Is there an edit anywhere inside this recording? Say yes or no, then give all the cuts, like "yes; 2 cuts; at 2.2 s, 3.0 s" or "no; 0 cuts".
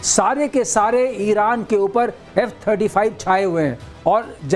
no; 0 cuts